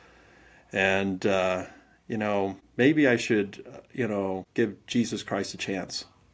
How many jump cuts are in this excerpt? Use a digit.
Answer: 2